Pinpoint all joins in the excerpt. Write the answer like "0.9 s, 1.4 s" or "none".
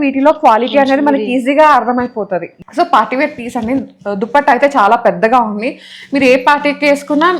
2.6 s